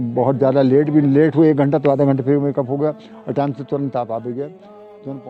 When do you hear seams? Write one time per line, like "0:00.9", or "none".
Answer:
none